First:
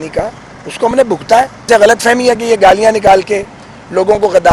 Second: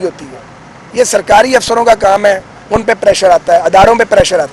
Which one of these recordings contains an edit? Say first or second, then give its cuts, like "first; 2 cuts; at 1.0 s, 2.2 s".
first; 1 cut; at 1.6 s